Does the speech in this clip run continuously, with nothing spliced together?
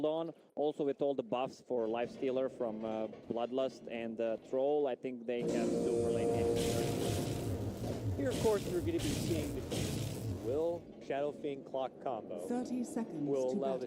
no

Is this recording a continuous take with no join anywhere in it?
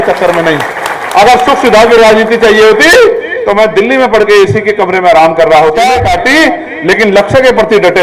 no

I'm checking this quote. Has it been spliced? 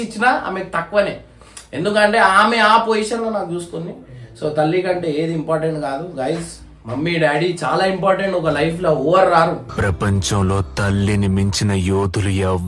no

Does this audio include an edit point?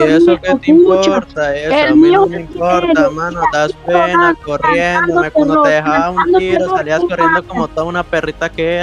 no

